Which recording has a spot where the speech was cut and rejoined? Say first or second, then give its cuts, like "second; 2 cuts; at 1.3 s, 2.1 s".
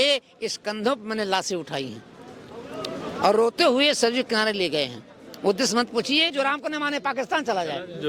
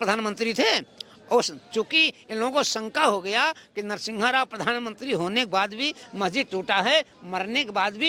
first; 1 cut; at 6.3 s